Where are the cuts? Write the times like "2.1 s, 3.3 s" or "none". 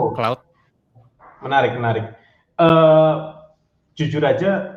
none